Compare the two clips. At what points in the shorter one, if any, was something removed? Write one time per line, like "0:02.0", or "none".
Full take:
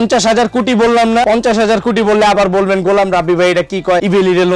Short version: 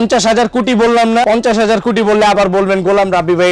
none